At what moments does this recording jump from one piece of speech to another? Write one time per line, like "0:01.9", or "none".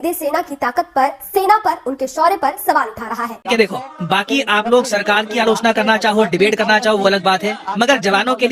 0:03.5

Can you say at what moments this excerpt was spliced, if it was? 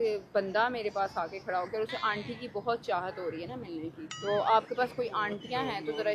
0:04.1

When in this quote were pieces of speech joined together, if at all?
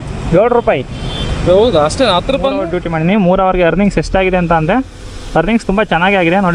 0:02.8

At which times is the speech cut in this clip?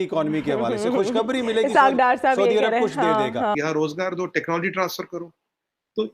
0:03.5

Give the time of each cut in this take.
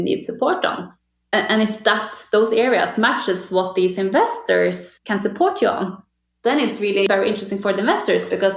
0:00.9
0:04.9
0:07.1

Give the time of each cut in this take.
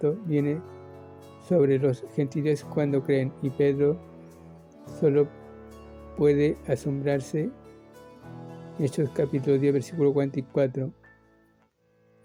none

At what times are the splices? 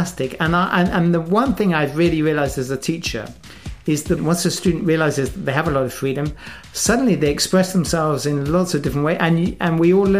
0:04.2

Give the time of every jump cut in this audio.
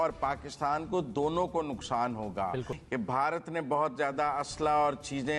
0:02.8

